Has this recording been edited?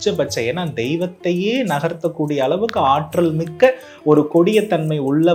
no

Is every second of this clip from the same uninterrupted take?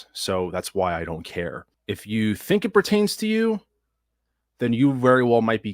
no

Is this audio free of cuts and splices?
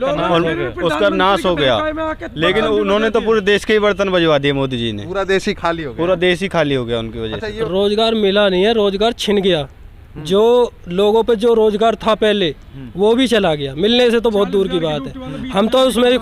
no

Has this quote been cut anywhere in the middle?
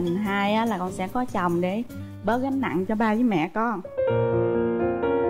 no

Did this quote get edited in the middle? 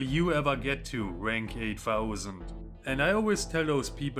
yes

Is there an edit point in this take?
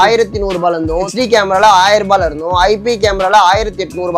yes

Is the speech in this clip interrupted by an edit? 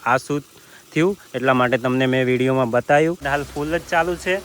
yes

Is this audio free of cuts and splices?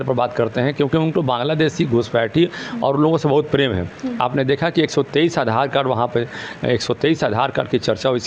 yes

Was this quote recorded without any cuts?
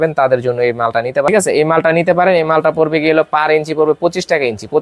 no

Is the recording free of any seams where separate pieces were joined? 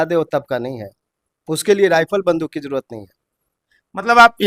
yes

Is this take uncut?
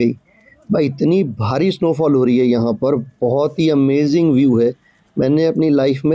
yes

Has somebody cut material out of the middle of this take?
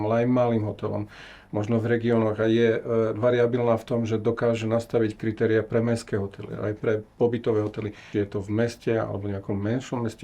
yes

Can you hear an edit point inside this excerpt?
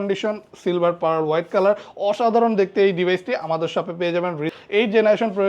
yes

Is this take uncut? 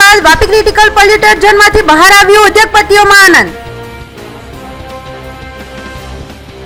yes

